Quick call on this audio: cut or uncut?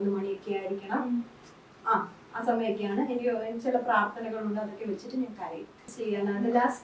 cut